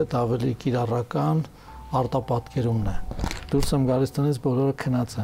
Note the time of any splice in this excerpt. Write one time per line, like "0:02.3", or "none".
0:03.3